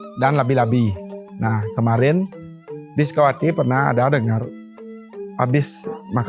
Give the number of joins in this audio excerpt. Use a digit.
1